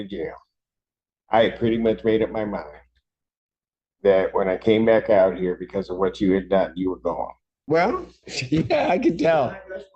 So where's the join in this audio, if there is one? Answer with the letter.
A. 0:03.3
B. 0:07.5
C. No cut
B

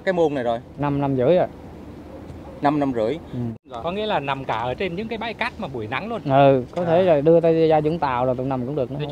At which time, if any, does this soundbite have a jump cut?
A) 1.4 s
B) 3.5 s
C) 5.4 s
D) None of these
B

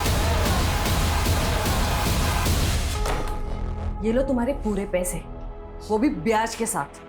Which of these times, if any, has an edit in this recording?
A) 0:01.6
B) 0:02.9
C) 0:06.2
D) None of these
B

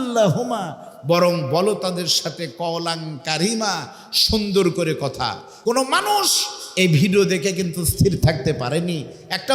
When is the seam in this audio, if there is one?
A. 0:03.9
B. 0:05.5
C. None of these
B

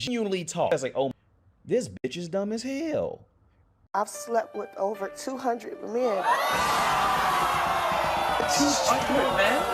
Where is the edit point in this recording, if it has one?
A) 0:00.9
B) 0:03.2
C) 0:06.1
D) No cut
A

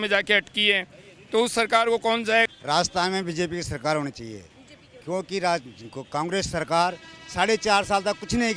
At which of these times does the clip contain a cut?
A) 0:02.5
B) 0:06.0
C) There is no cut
A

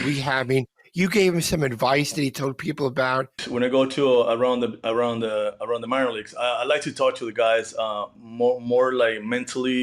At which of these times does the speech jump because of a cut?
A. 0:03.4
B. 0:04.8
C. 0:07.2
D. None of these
A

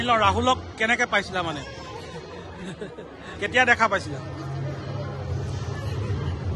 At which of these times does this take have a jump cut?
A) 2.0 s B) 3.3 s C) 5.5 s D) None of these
B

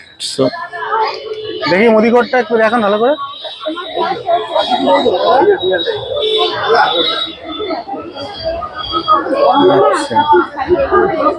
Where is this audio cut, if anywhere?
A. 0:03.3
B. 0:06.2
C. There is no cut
C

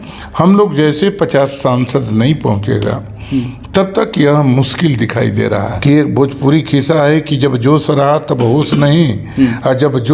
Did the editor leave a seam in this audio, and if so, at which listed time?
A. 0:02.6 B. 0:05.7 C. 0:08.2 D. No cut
B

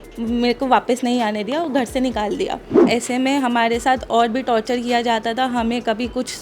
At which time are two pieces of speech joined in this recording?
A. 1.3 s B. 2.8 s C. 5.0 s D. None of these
B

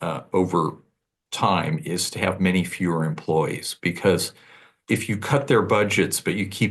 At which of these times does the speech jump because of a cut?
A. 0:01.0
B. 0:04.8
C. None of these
B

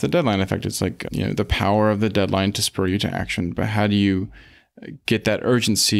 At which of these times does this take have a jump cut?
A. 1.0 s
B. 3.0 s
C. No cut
A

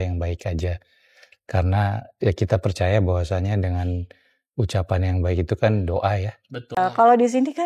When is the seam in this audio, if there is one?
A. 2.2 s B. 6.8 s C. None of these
B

